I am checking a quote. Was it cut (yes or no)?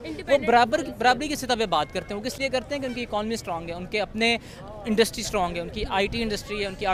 no